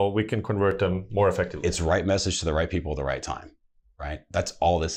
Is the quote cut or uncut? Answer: uncut